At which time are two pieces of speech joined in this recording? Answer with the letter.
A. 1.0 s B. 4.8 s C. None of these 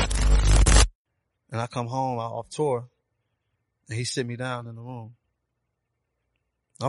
A